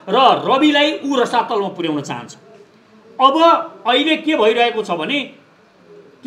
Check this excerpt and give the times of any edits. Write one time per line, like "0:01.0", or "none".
none